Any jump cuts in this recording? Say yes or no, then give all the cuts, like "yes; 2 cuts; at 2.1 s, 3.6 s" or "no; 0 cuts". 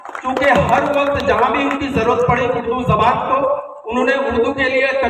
no; 0 cuts